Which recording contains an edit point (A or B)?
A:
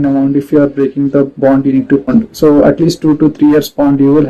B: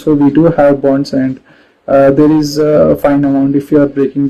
A